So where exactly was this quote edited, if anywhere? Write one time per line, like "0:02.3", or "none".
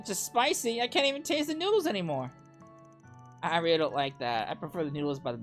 none